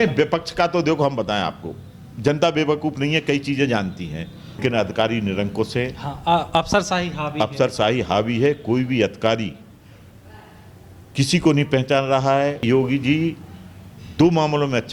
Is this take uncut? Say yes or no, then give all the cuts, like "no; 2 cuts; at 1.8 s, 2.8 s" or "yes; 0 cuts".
no; 2 cuts; at 4.6 s, 12.6 s